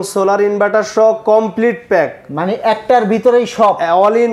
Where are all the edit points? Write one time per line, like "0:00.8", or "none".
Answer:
none

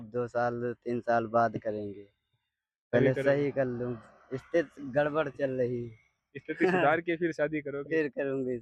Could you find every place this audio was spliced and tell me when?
none

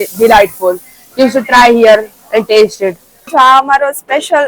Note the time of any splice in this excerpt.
0:03.3

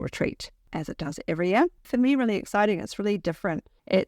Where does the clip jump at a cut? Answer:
0:01.8

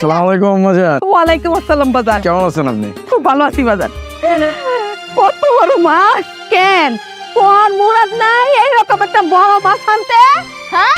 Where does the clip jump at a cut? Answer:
0:04.0
0:06.3

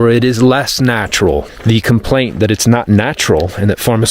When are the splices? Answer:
0:01.5

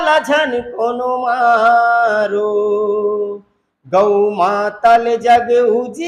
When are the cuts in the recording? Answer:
none

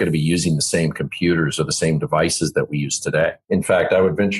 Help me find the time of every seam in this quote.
0:03.4

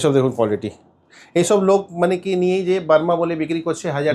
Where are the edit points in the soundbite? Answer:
none

